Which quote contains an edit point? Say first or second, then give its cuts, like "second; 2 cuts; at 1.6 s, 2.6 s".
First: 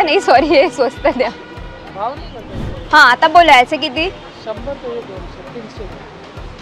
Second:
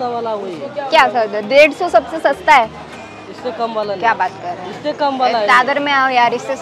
first; 1 cut; at 2.8 s